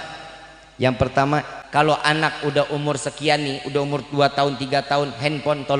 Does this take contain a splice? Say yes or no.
yes